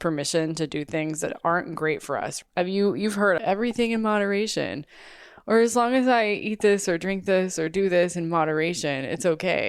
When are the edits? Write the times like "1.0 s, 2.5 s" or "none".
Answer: 2.3 s, 3.4 s